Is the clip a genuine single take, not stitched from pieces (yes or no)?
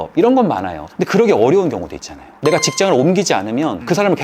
yes